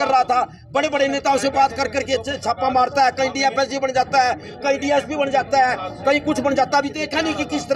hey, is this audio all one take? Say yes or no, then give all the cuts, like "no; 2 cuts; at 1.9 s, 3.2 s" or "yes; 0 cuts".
yes; 0 cuts